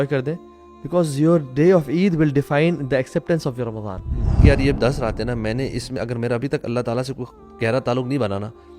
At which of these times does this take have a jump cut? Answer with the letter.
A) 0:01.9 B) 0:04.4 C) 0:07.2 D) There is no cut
B